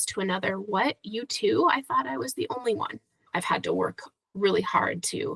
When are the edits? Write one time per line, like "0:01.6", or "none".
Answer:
0:03.2